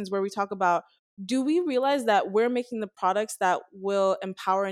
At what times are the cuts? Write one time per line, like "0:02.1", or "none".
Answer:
none